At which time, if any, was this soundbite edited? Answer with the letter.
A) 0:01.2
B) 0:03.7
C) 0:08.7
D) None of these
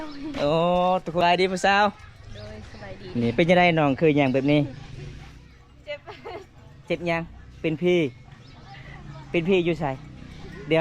A